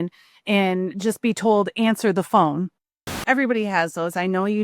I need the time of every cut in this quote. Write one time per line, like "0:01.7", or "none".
0:03.2